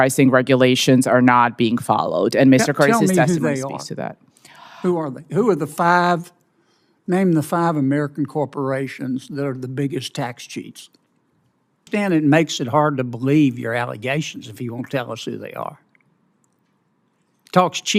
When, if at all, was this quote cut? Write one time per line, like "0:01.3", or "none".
0:11.8